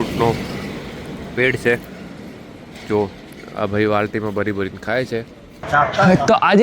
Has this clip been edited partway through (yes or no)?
yes